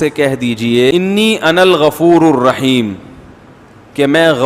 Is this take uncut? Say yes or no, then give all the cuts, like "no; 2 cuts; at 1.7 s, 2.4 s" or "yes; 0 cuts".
no; 1 cut; at 0.9 s